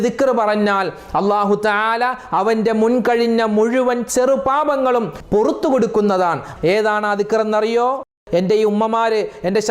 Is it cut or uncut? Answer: cut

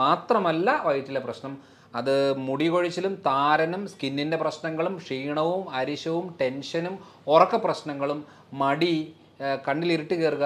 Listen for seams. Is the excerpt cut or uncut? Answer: uncut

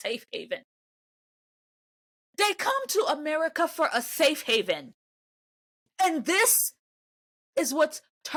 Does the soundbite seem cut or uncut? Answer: uncut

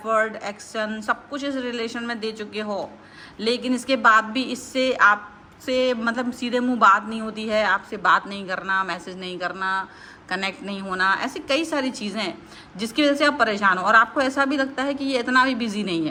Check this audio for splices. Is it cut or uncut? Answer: uncut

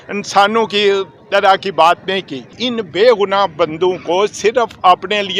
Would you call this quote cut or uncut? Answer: cut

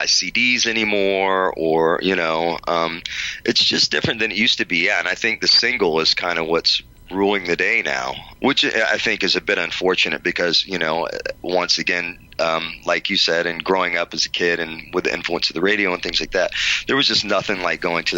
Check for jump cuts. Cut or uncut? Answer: cut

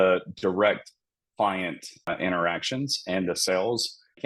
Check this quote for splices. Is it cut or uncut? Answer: cut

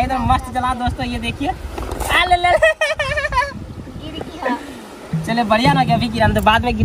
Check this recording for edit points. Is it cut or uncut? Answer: uncut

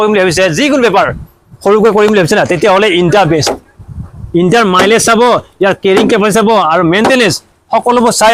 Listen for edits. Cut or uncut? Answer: uncut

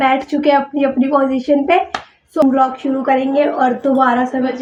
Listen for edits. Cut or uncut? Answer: uncut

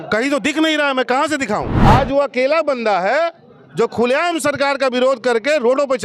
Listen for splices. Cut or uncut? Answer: cut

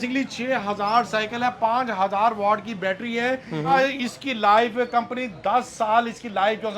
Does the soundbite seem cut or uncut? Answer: cut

